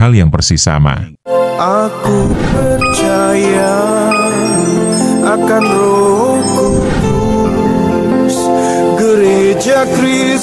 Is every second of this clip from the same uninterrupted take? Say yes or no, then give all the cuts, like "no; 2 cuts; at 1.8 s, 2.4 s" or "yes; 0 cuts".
no; 1 cut; at 1.1 s